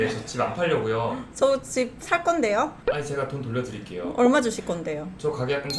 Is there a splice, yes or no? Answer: yes